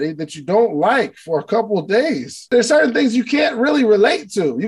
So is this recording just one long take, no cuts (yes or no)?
no